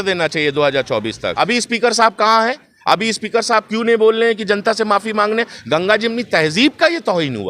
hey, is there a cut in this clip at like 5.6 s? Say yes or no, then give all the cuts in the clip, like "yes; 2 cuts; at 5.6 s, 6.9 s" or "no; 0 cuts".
no; 1 cut; at 1.3 s